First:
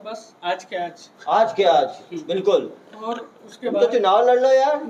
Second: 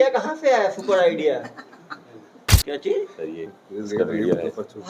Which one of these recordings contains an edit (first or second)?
second